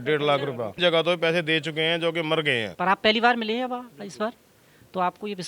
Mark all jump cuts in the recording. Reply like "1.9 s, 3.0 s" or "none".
0.8 s, 2.7 s